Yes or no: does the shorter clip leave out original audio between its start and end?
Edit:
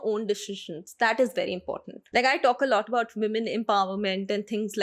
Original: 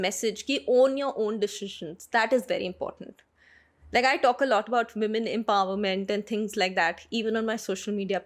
yes